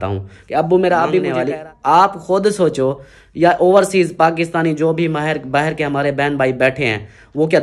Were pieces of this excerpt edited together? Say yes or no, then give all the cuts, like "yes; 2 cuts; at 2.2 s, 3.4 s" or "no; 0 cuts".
yes; 1 cut; at 1.3 s